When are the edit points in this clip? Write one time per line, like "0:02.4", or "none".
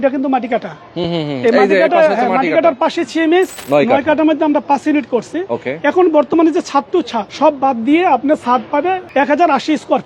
0:03.6
0:07.2
0:09.0